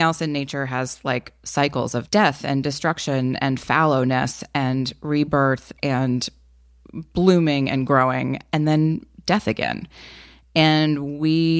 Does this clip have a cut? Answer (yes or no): yes